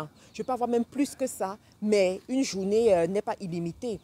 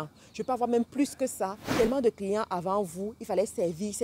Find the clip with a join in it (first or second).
second